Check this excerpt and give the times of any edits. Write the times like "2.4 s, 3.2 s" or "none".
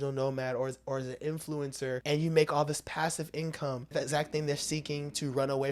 2.0 s, 3.9 s